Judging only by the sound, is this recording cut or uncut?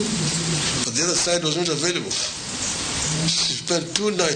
uncut